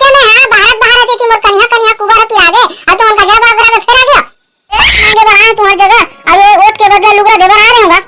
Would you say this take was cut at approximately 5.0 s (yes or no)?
yes